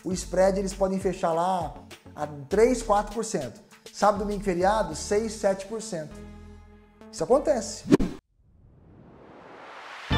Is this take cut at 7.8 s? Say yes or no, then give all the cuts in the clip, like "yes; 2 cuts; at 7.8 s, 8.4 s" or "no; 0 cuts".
yes; 1 cut; at 7.8 s